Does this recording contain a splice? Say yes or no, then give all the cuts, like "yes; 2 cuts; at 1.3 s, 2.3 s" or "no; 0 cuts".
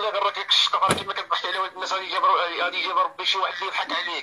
no; 0 cuts